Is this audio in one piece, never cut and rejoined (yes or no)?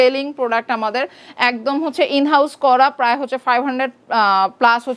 yes